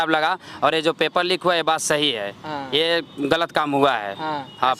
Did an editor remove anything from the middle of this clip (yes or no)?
no